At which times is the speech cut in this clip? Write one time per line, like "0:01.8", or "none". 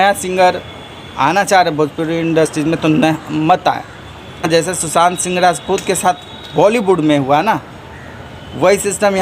0:04.5